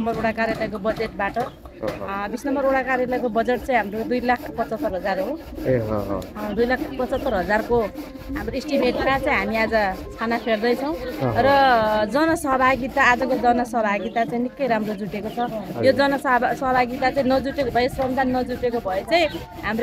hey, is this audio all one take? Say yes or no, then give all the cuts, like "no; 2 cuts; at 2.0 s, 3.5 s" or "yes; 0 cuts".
yes; 0 cuts